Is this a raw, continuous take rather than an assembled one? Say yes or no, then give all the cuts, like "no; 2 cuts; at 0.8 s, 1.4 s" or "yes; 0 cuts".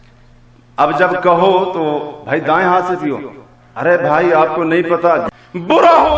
no; 1 cut; at 5.2 s